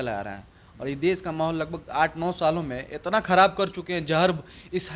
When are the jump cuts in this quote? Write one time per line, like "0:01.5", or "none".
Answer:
none

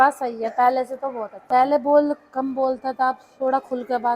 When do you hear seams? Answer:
0:01.4

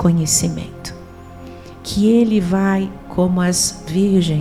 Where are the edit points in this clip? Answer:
none

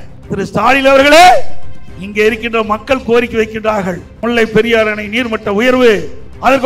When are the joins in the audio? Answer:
0:04.1

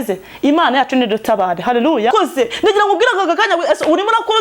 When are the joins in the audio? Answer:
0:02.1

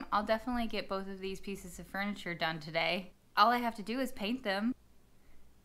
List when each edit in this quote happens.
0:03.2
0:04.7

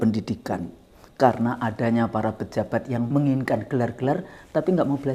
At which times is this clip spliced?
0:03.1

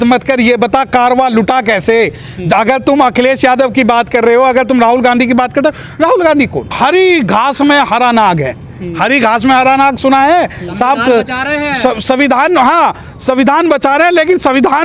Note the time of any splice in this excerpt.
none

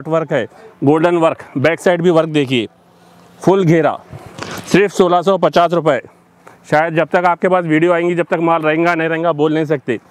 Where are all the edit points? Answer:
none

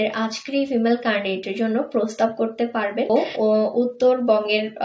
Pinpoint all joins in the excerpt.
0:03.3

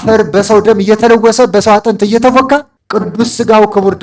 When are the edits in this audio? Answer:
0:02.8

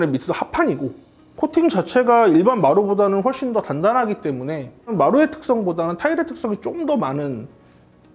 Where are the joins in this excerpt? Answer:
none

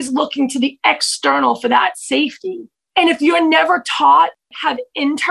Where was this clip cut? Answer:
0:02.7
0:04.4

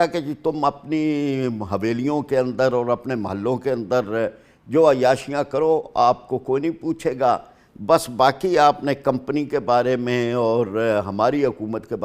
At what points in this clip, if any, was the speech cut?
none

